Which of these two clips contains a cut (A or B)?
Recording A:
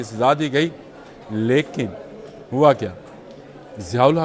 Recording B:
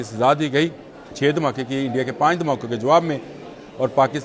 B